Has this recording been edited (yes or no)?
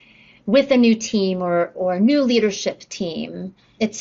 no